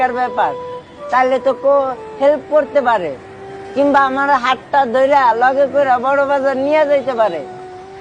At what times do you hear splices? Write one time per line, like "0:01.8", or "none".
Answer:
none